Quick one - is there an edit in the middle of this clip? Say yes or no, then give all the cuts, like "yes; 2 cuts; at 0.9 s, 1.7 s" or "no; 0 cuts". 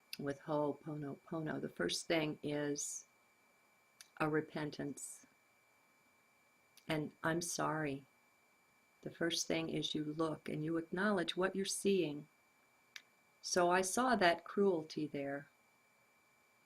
yes; 1 cut; at 12.1 s